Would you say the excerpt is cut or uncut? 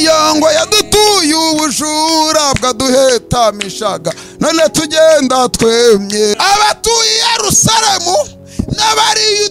cut